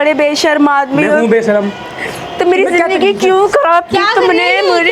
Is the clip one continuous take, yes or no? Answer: yes